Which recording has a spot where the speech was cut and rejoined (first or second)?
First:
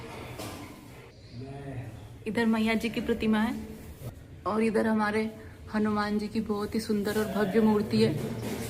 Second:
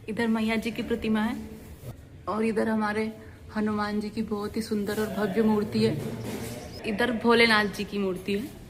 first